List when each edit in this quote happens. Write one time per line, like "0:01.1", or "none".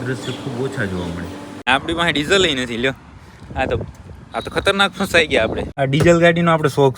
0:01.6
0:05.7